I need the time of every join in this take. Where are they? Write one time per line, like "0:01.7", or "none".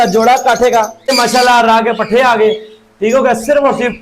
0:01.1